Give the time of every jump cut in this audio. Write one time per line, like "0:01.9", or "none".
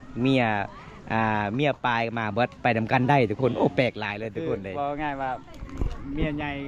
none